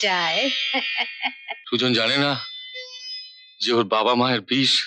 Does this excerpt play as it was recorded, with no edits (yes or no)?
no